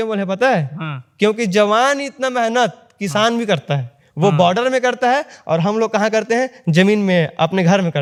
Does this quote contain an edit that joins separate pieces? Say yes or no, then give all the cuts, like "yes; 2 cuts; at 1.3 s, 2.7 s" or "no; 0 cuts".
no; 0 cuts